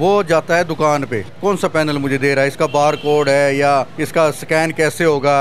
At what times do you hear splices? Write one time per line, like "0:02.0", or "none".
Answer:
0:01.3
0:04.0